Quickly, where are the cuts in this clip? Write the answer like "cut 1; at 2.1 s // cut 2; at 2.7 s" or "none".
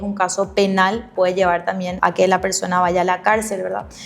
cut 1; at 1.1 s // cut 2; at 1.9 s